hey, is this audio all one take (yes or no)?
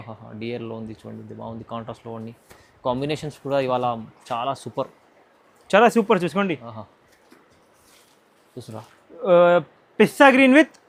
yes